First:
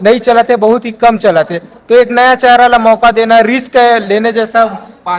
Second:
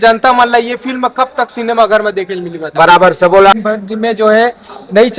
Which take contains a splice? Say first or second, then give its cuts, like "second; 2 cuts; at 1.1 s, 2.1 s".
second; 1 cut; at 3.5 s